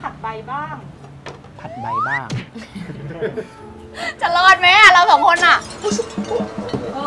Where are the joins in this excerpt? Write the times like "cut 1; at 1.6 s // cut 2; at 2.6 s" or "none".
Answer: cut 1; at 5.7 s